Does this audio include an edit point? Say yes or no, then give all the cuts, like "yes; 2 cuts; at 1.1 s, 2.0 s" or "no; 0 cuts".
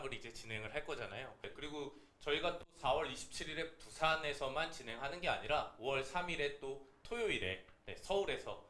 yes; 1 cut; at 1.4 s